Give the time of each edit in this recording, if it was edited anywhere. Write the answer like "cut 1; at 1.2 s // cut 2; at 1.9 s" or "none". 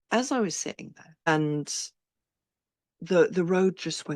cut 1; at 1.3 s